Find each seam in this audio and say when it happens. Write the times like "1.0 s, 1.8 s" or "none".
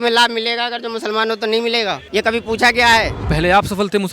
2.0 s, 3.2 s